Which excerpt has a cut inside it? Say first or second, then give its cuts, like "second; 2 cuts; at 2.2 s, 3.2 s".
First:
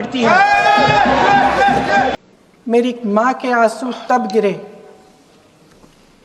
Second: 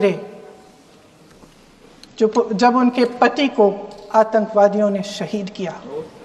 first; 1 cut; at 2.1 s